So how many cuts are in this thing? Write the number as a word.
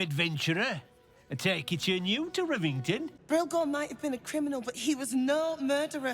one